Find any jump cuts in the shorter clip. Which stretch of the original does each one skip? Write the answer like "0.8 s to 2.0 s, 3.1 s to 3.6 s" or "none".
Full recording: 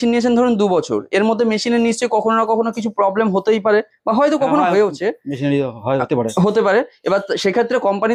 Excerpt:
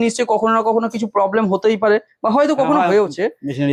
none